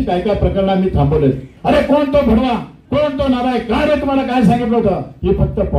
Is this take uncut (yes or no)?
no